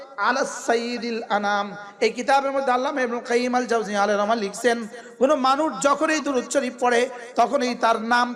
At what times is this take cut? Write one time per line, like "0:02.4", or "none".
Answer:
none

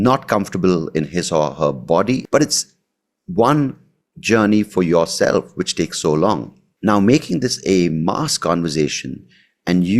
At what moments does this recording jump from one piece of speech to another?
0:02.2

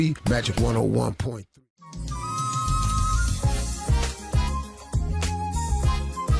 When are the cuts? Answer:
0:01.4

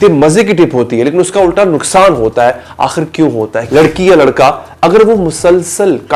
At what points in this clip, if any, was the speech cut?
0:03.6

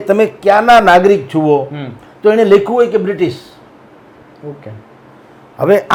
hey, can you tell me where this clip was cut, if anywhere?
none

